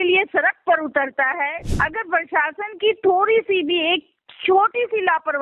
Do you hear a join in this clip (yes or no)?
yes